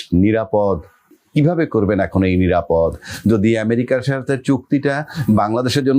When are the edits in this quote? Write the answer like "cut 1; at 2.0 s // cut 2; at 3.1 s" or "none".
cut 1; at 1.2 s